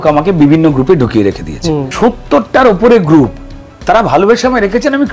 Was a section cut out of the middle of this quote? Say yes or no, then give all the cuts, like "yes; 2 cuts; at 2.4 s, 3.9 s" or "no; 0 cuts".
yes; 1 cut; at 1.9 s